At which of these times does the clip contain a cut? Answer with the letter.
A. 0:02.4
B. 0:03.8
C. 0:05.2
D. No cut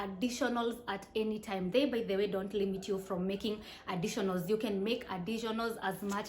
D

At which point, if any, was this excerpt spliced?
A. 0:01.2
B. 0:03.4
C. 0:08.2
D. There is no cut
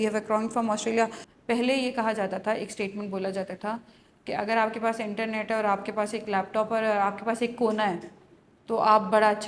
A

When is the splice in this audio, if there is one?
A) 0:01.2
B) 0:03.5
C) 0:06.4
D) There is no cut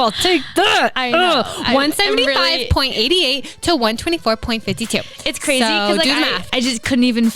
C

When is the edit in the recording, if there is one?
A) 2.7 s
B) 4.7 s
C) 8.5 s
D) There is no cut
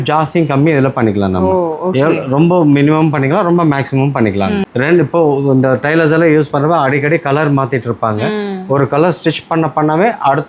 B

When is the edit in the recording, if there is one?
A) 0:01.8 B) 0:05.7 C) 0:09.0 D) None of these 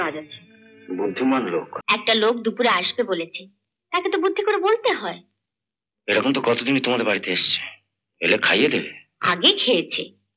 A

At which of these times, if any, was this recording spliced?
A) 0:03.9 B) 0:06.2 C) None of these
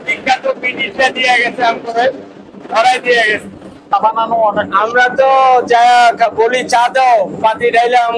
A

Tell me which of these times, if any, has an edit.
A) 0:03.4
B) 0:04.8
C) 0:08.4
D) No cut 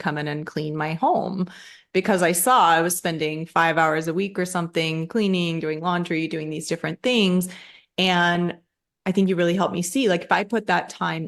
D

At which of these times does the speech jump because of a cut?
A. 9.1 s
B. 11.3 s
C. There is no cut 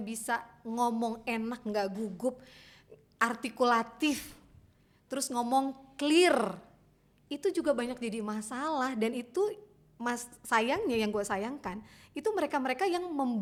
C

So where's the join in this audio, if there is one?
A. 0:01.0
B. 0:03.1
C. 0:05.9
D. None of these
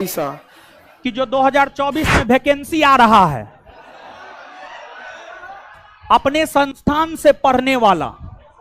A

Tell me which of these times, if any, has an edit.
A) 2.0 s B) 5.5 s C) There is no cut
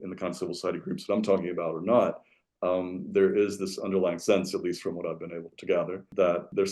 B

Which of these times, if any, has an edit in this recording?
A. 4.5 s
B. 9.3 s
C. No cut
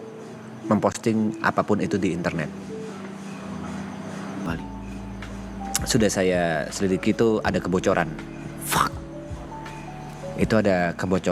A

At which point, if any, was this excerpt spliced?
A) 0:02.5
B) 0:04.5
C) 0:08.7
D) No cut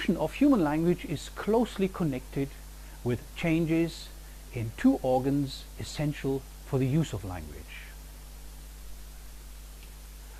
A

